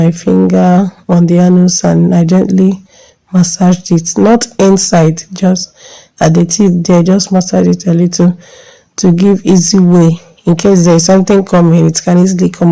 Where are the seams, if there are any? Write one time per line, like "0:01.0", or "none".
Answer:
none